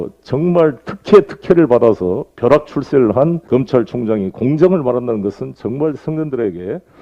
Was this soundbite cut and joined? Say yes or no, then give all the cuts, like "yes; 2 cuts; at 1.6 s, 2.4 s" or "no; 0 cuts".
yes; 1 cut; at 3.4 s